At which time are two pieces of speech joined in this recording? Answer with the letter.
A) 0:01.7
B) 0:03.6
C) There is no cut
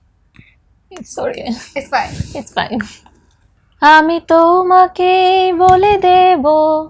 B